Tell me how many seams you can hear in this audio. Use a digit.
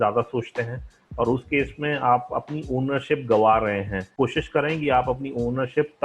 1